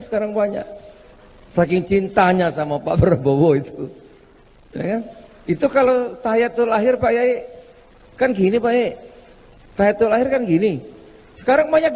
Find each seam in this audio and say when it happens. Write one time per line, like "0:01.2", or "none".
none